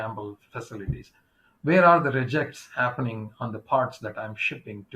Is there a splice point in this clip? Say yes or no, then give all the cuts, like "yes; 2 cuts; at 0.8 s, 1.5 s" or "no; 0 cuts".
no; 0 cuts